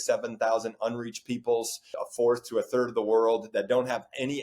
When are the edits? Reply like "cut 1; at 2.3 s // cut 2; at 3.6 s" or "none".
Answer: cut 1; at 1.9 s